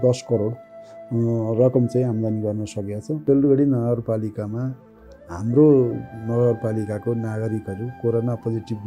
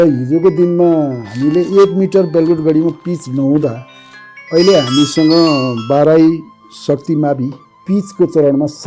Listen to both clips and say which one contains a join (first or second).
first